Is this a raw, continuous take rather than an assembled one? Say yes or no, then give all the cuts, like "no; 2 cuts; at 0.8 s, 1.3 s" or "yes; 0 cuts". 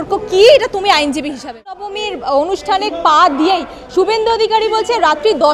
no; 1 cut; at 1.9 s